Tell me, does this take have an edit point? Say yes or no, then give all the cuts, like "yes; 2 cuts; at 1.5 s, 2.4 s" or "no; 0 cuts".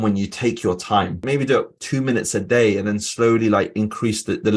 yes; 1 cut; at 1.2 s